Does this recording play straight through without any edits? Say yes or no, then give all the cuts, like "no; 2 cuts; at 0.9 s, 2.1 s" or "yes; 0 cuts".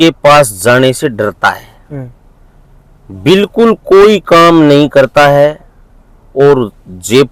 yes; 0 cuts